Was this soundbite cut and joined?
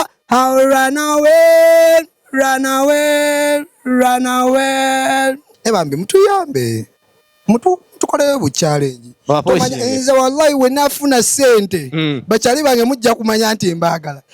yes; 1 cut; at 5.5 s

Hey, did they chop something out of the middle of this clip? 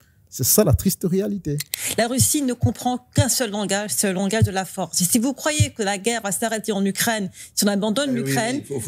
yes; 1 cut; at 1.7 s

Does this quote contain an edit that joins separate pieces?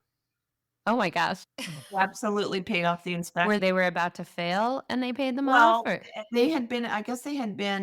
no; 0 cuts

